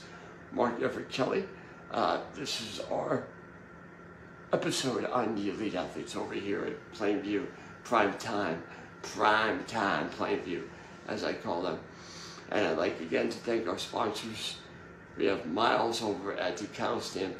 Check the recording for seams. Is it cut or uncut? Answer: uncut